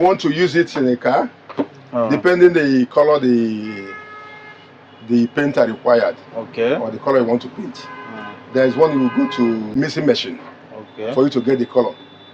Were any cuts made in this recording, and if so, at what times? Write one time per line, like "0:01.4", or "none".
0:09.8